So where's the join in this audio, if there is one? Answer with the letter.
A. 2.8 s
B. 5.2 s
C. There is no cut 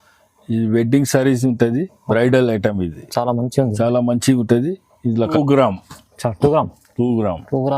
B